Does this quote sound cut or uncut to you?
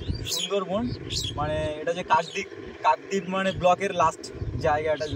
uncut